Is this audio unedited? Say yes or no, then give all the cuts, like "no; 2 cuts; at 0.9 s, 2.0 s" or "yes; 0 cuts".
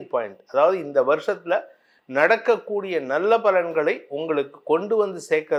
yes; 0 cuts